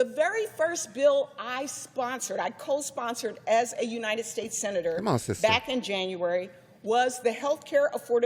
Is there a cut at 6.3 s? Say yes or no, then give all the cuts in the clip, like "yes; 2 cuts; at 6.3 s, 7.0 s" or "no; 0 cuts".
no; 0 cuts